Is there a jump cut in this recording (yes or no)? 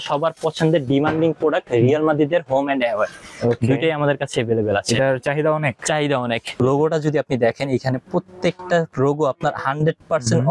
yes